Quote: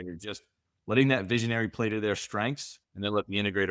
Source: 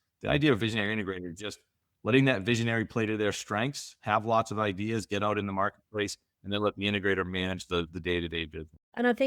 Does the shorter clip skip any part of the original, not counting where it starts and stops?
yes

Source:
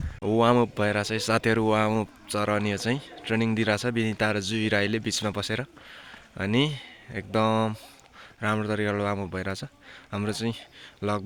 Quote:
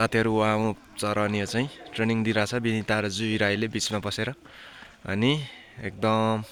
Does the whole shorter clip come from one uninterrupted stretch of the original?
yes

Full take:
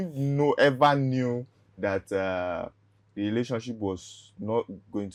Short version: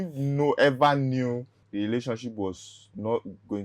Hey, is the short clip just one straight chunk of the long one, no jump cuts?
no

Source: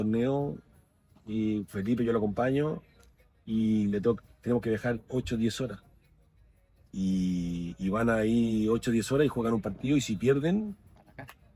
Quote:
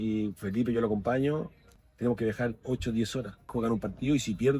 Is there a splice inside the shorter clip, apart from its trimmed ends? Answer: yes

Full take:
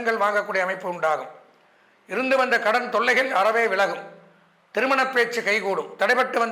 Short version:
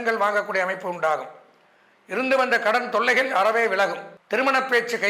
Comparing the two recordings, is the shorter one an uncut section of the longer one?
no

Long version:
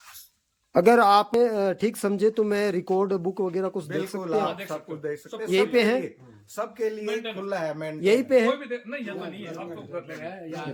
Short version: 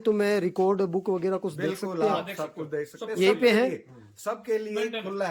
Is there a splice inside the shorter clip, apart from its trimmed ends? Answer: no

